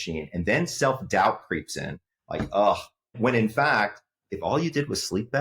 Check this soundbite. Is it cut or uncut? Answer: cut